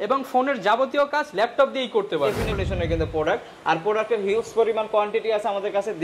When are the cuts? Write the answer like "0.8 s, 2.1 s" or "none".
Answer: 2.5 s

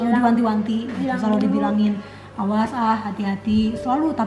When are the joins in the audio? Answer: none

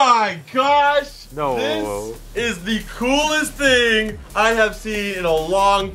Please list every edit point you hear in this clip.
1.2 s, 2.2 s

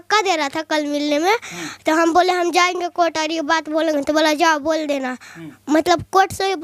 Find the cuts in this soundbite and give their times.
none

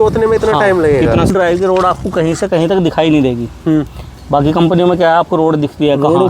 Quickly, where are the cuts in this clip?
1.3 s

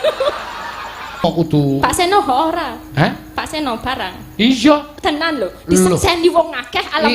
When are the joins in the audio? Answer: 1.2 s

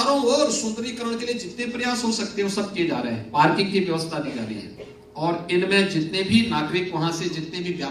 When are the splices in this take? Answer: none

